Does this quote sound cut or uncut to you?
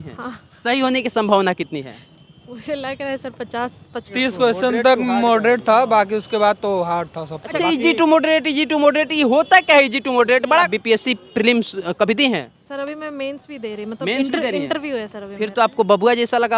cut